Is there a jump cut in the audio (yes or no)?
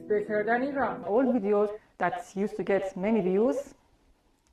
yes